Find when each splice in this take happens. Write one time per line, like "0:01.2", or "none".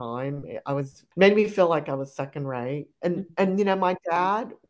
0:01.0